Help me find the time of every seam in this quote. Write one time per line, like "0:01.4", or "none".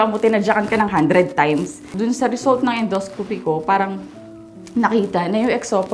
0:01.9